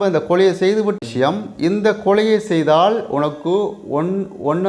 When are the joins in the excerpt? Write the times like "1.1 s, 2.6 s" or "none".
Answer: 0.9 s